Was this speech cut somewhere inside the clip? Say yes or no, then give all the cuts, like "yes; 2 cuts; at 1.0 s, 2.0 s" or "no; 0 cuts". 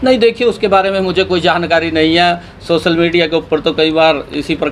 no; 0 cuts